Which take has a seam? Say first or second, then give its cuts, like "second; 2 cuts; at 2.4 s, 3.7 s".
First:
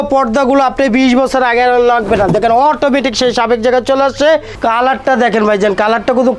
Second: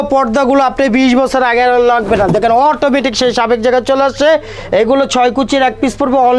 first; 1 cut; at 4.5 s